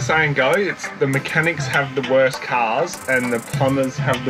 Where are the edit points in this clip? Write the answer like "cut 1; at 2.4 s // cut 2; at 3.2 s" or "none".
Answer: none